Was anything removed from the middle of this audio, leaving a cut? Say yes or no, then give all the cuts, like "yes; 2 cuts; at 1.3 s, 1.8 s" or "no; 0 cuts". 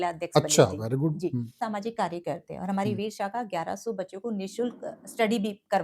yes; 1 cut; at 1.6 s